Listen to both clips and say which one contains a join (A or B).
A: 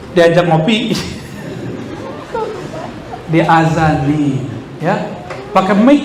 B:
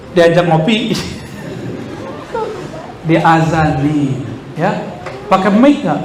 B